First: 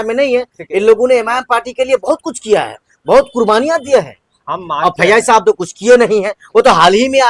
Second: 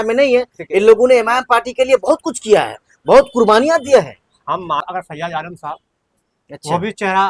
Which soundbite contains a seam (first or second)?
second